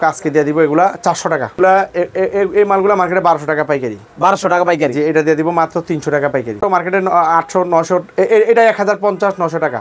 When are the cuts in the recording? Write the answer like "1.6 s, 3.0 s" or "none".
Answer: 1.6 s, 6.6 s

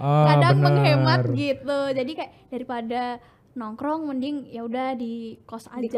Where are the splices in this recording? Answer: none

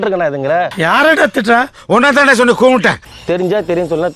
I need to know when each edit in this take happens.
3.1 s

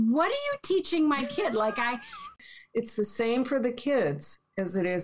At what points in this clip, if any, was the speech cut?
2.3 s

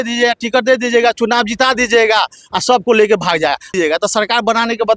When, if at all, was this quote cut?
3.7 s

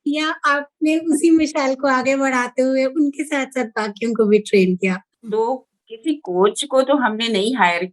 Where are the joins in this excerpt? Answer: 5.1 s

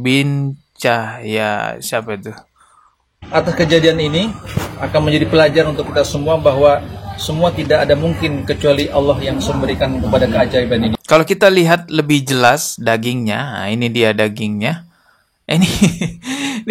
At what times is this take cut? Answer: 11.0 s

